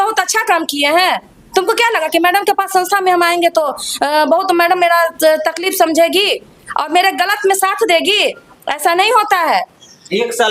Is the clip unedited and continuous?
yes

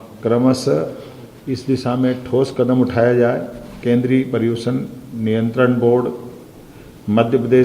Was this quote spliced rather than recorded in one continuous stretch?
yes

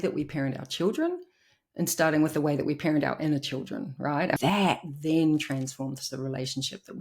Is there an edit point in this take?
yes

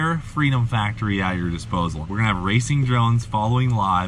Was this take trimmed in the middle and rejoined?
yes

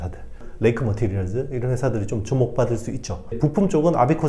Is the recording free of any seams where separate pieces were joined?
no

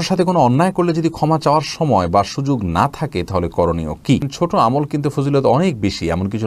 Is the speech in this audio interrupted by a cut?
yes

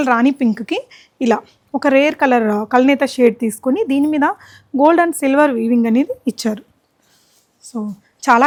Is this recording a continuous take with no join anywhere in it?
yes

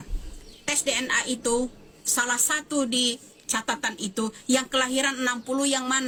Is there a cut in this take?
no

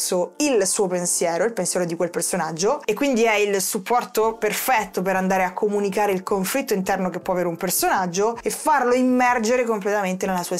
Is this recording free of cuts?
no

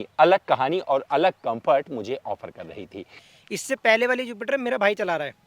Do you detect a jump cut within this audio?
yes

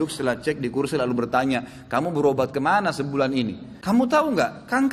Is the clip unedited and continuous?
no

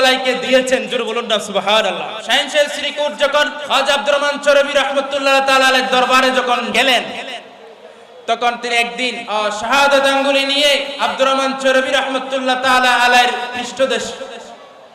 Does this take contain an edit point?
yes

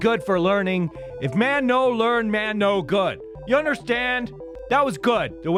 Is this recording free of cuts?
yes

